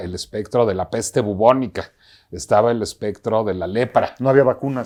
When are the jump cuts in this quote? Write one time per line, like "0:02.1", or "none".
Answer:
none